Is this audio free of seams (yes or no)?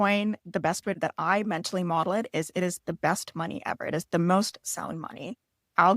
no